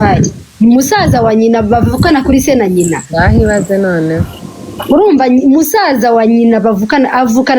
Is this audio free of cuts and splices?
yes; 0 cuts

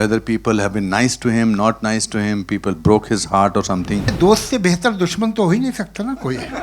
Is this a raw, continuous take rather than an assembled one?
no; 1 cut; at 4.1 s

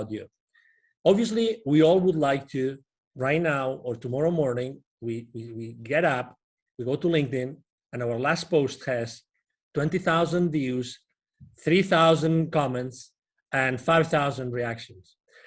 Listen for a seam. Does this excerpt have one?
no; 0 cuts

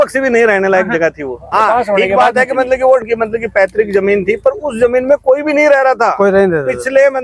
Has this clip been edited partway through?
yes; 1 cut; at 1.5 s

